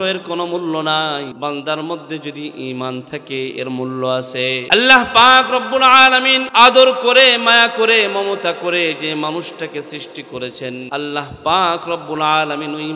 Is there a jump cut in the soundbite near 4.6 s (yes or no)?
yes